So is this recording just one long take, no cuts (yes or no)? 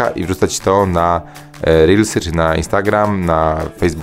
yes